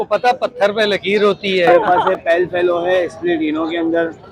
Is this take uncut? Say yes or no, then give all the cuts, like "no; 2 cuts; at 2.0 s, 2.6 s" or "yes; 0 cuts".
no; 1 cut; at 1.8 s